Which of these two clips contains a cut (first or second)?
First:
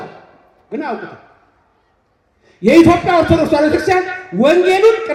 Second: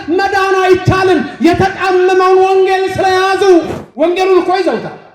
second